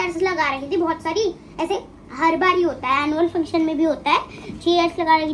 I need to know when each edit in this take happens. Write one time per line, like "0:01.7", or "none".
none

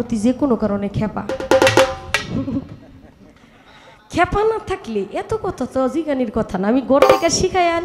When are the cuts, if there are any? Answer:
none

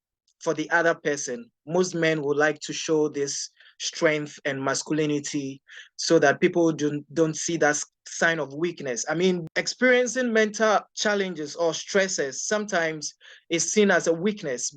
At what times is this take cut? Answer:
0:09.4
0:10.9

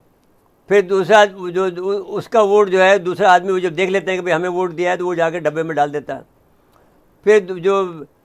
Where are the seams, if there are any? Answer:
none

